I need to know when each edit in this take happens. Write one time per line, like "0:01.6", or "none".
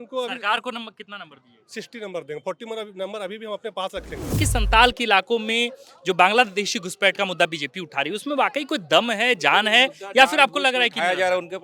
0:04.4